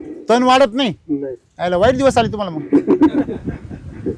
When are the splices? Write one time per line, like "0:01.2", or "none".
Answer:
none